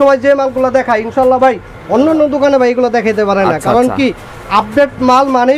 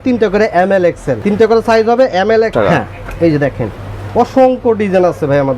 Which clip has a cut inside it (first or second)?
second